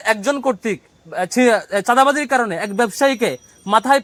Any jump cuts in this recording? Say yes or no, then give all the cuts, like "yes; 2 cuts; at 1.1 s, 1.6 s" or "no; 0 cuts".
no; 0 cuts